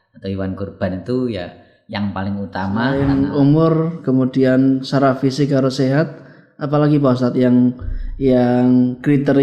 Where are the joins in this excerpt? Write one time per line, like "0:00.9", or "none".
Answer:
0:02.9